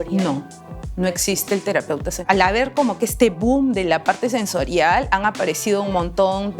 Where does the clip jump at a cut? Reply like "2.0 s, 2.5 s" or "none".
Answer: 2.3 s